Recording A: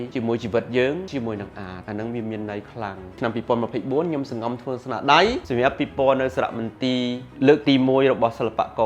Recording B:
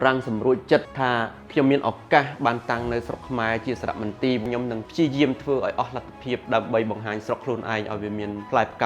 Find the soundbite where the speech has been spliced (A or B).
A